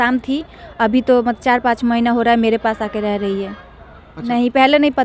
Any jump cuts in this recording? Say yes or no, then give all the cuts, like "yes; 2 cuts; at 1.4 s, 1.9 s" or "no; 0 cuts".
no; 0 cuts